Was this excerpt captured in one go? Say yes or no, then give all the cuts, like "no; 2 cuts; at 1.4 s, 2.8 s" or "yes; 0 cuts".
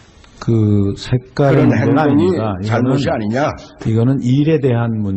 no; 1 cut; at 2.8 s